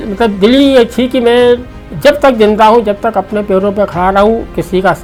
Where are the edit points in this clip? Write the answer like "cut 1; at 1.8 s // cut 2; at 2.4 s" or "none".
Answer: none